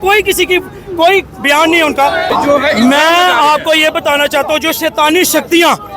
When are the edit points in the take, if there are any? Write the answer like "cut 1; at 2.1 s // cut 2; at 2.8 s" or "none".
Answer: cut 1; at 2.3 s

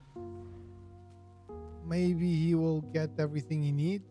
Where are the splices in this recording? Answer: cut 1; at 1.8 s

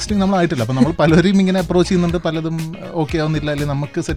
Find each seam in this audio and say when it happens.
none

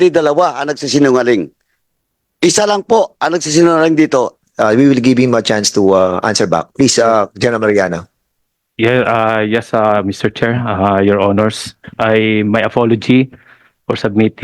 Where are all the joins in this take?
cut 1; at 4.4 s

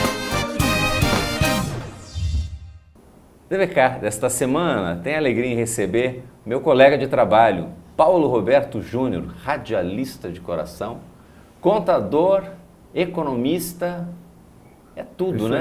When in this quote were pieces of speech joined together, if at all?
none

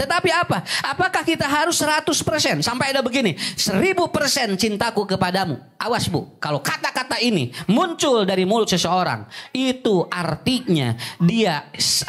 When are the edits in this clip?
none

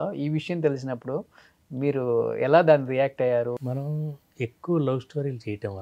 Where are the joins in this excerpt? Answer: cut 1; at 3.5 s

